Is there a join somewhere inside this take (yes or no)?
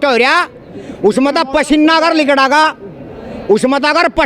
no